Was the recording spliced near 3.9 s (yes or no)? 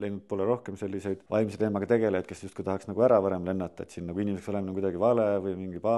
no